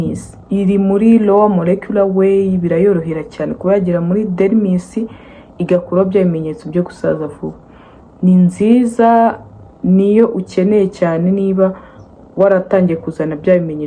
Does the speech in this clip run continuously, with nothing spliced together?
yes; 0 cuts

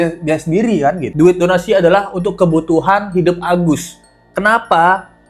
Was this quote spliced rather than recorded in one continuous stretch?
yes; 1 cut; at 1.0 s

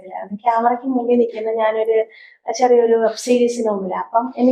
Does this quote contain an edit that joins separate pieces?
no; 0 cuts

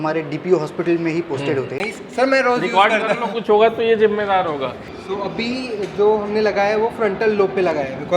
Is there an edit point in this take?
yes; 2 cuts; at 1.8 s, 4.9 s

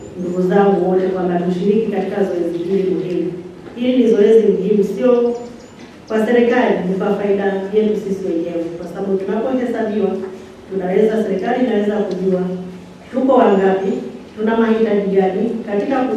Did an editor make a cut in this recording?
no; 0 cuts

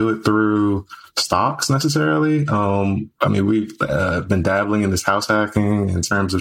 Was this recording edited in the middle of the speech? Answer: no; 0 cuts

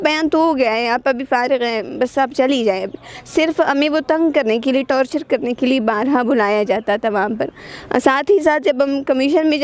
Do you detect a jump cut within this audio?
no; 0 cuts

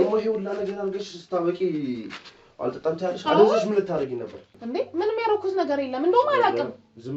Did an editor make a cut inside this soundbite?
yes; 1 cut; at 4.6 s

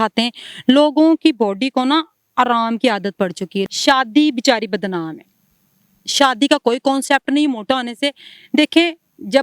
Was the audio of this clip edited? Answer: yes; 1 cut; at 3.6 s

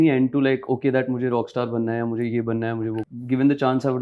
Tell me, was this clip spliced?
yes; 1 cut; at 3.0 s

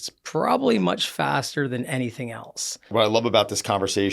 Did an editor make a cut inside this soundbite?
yes; 1 cut; at 2.9 s

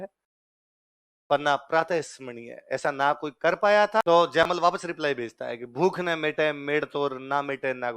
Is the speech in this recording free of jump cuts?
no; 1 cut; at 4.0 s

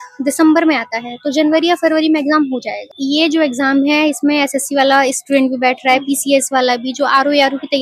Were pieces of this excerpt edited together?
yes; 1 cut; at 2.9 s

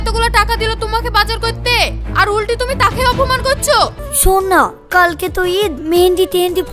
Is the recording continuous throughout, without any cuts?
no; 1 cut; at 4.0 s

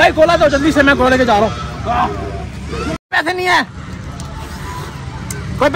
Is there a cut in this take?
yes; 1 cut; at 3.0 s

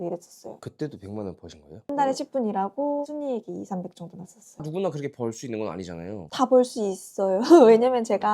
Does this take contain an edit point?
yes; 4 cuts; at 1.9 s, 3.0 s, 4.4 s, 6.2 s

